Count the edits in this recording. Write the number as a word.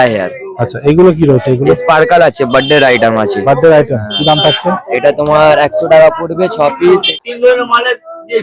one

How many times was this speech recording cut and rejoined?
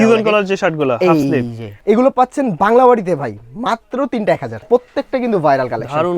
two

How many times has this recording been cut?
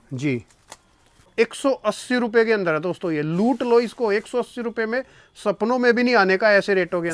one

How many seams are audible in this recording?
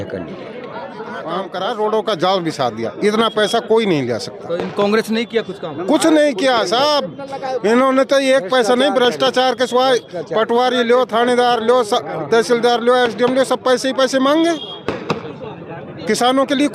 one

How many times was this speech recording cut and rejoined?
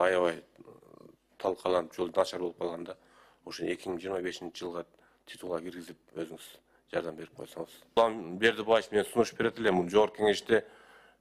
one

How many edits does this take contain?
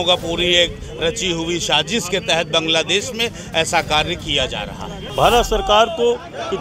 one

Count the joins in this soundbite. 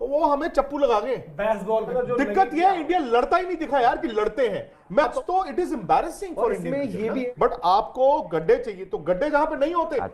three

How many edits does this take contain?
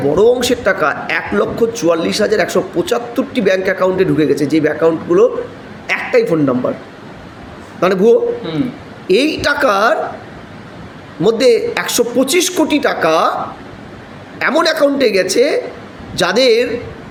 zero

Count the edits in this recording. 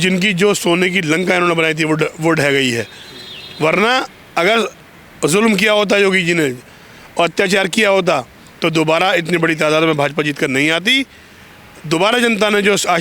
zero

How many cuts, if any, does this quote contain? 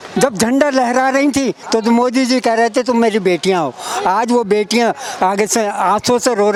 zero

